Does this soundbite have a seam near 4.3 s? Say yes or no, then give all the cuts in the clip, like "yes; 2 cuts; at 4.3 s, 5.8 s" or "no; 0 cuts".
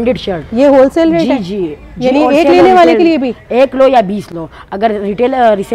no; 0 cuts